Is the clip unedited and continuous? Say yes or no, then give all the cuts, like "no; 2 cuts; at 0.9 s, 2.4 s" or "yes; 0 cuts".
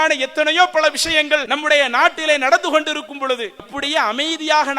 no; 2 cuts; at 1.5 s, 3.8 s